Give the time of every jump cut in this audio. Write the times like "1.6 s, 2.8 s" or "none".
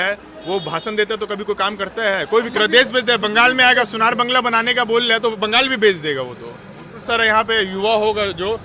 2.5 s, 7.1 s